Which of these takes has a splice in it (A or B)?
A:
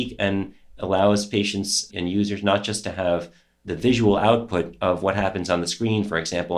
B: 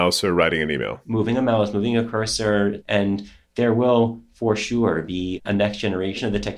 B